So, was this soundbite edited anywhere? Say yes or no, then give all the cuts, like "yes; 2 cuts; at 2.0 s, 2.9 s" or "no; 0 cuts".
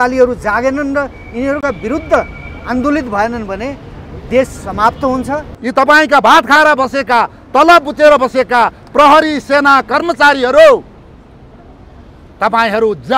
yes; 1 cut; at 5.5 s